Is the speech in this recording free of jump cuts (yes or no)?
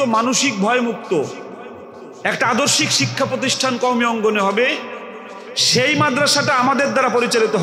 yes